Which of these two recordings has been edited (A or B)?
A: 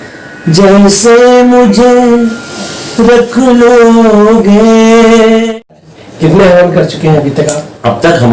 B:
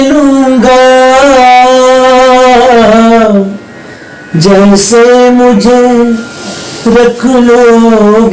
A